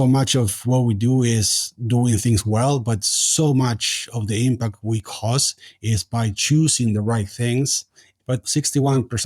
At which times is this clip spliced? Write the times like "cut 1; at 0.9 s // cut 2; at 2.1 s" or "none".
cut 1; at 8.3 s